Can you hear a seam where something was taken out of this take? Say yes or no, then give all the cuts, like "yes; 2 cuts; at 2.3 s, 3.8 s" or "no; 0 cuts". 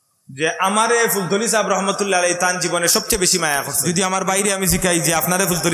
yes; 1 cut; at 3.7 s